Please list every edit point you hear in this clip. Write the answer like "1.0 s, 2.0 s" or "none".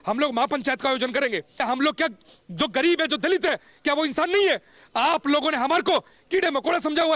1.5 s